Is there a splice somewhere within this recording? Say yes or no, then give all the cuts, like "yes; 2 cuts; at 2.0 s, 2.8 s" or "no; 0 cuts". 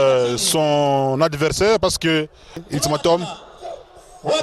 yes; 1 cut; at 2.6 s